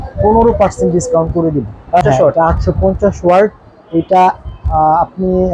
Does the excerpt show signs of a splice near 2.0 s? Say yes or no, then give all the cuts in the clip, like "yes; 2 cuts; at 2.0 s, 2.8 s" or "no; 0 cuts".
yes; 1 cut; at 2.0 s